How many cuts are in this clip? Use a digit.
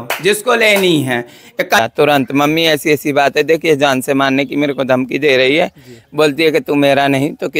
1